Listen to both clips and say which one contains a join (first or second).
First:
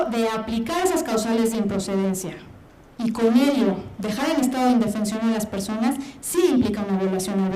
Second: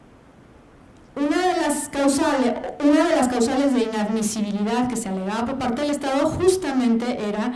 first